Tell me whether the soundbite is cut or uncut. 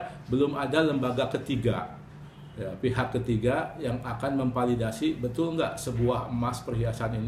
uncut